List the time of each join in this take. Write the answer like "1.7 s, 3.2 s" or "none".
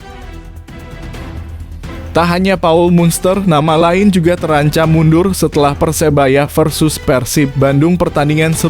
2.1 s